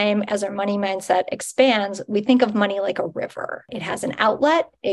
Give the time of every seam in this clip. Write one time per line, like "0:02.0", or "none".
0:03.8